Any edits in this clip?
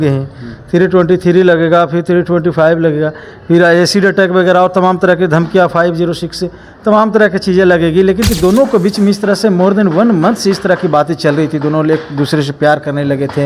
yes; 1 cut; at 8.2 s

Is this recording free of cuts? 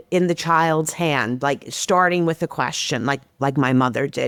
yes; 0 cuts

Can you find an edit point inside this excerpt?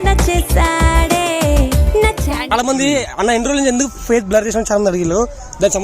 yes; 1 cut; at 2.5 s

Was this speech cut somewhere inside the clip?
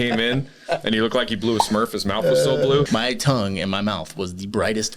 yes; 1 cut; at 2.9 s

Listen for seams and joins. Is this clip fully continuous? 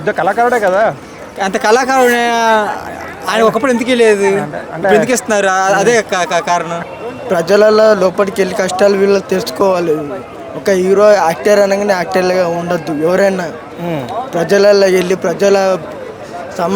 no; 1 cut; at 6.7 s

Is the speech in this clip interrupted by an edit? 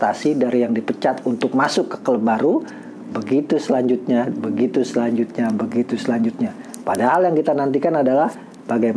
no; 0 cuts

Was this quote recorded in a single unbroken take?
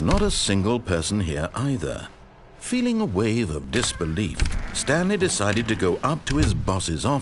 yes; 0 cuts

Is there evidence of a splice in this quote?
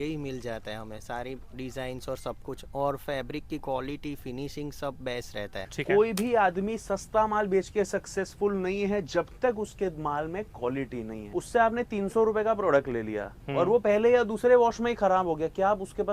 yes; 2 cuts; at 5.7 s, 11.2 s

